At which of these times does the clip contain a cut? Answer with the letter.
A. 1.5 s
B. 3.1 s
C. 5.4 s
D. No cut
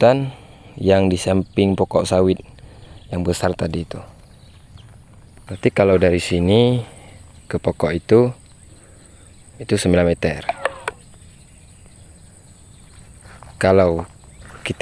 C